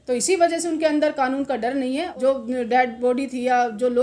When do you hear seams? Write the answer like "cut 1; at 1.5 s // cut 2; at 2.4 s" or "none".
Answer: cut 1; at 2.1 s